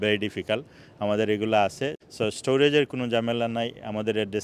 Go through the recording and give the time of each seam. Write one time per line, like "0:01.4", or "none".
0:02.0

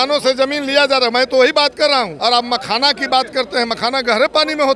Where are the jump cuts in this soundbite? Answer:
0:02.1

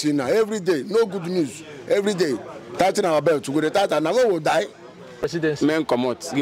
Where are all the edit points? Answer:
0:05.3

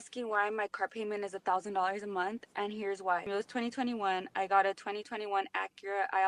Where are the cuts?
none

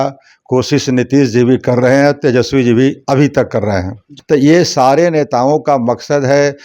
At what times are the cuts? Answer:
0:04.1

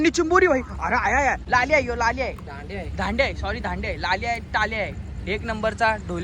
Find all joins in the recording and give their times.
0:01.4

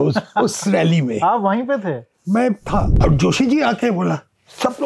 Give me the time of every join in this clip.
0:02.9

